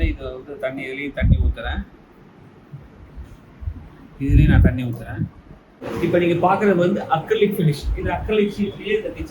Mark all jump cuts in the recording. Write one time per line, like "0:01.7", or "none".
0:05.8